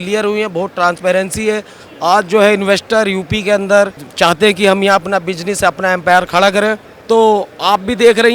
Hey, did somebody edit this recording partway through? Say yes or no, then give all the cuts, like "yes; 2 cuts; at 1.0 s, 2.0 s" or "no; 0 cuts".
no; 0 cuts